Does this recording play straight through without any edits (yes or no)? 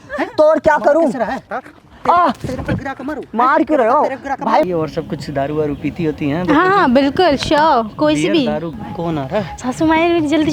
no